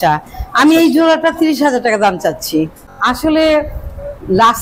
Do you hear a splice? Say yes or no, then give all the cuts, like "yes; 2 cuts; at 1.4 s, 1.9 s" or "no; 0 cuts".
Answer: yes; 1 cut; at 2.9 s